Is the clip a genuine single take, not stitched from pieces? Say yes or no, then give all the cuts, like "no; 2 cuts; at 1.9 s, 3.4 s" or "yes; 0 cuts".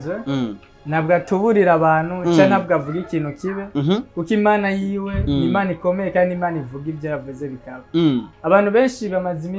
yes; 0 cuts